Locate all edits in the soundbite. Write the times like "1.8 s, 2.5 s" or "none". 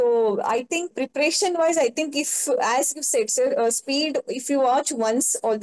0.9 s